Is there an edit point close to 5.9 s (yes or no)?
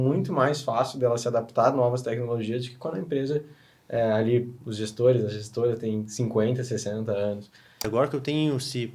no